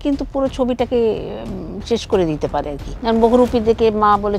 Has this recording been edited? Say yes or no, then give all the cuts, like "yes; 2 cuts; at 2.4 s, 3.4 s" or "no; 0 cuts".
yes; 1 cut; at 2.8 s